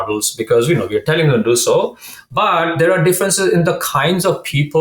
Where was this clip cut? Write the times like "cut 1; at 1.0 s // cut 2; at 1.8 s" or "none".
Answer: none